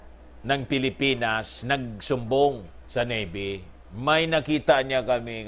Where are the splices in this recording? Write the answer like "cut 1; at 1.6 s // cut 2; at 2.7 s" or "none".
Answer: cut 1; at 2.8 s